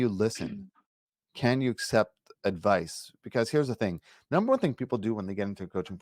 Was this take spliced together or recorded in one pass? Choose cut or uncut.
uncut